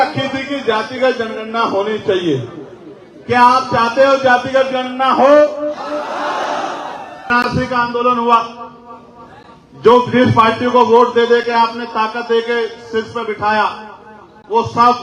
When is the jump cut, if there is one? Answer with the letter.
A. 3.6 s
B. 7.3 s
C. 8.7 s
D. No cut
B